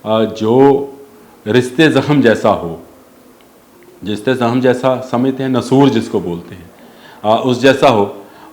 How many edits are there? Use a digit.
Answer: 0